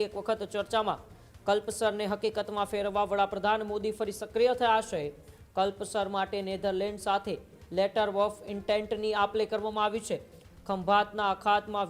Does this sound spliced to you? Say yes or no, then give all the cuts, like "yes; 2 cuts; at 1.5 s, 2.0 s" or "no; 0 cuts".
no; 0 cuts